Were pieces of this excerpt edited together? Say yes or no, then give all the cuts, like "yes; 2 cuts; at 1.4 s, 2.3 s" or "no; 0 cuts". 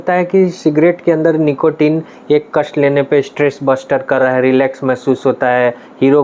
no; 0 cuts